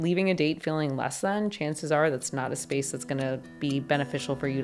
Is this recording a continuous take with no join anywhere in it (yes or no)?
yes